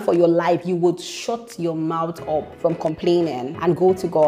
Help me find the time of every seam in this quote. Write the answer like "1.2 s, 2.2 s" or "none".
none